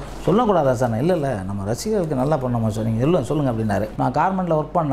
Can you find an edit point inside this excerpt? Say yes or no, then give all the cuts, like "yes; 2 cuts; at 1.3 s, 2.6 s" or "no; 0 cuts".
yes; 1 cut; at 3.9 s